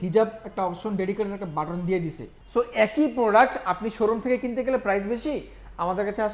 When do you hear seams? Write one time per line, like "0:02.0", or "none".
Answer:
0:02.3